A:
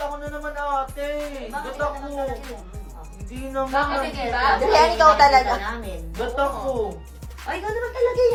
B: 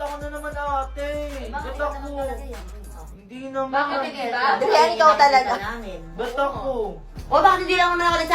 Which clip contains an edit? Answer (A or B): B